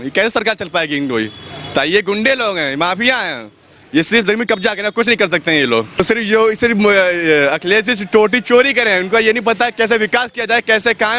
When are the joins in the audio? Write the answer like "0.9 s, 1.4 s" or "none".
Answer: 6.0 s